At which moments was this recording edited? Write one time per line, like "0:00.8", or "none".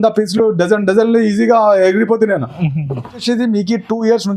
0:03.2